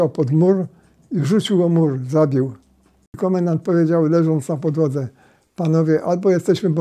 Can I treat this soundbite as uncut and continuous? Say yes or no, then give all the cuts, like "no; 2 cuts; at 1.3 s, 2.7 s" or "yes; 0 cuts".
no; 1 cut; at 3.2 s